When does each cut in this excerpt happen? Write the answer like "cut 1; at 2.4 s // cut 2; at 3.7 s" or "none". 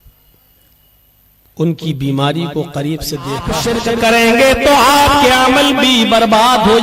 cut 1; at 3.6 s